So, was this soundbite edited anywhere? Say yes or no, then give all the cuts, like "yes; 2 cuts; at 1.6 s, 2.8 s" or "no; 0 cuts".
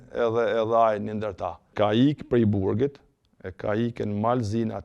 yes; 1 cut; at 1.6 s